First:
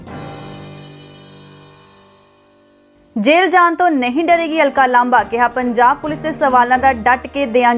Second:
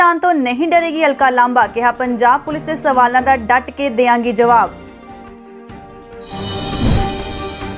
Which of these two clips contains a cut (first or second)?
first